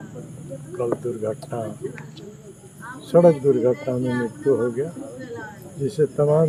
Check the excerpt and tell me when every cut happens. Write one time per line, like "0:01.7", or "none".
none

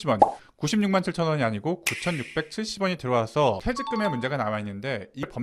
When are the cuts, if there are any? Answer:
0:03.6

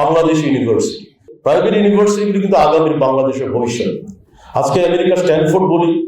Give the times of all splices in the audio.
0:01.3

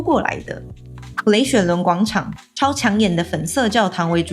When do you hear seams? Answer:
0:01.0
0:02.4

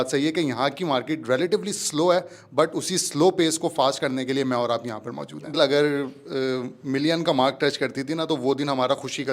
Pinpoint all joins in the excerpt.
0:05.6

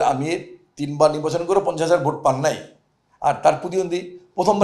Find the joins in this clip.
none

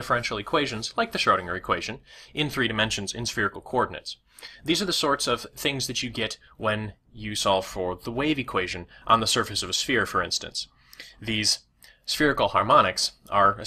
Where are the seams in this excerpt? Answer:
0:10.6

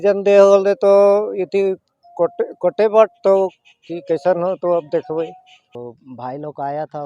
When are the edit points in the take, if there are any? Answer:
0:05.7

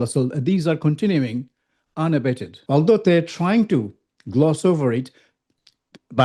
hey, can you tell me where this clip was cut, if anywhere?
0:02.5

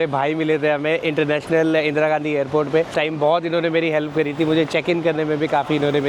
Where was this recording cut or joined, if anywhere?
0:02.9

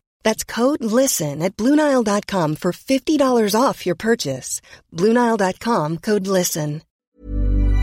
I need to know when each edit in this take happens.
0:06.9

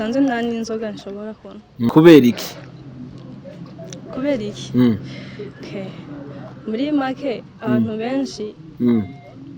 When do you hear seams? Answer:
0:01.9

